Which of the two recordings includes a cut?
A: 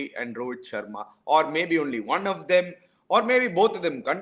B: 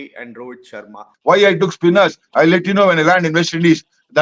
B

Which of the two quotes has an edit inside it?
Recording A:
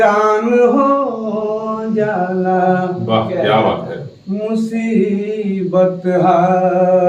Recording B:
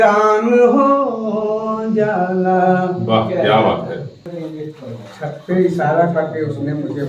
B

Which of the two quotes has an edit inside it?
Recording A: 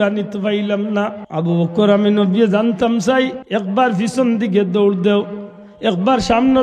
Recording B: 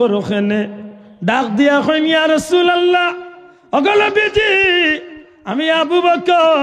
A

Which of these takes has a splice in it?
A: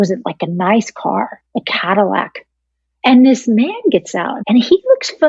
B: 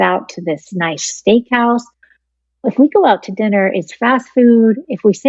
A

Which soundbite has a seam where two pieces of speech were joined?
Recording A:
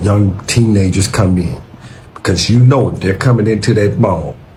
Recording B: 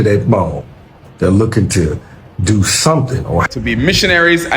B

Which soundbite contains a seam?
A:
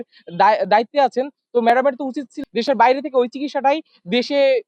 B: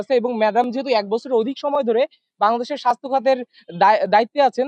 A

